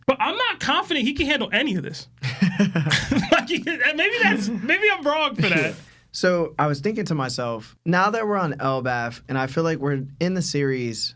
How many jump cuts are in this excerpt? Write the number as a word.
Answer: one